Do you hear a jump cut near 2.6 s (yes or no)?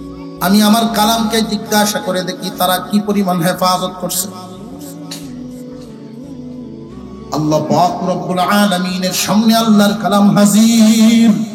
no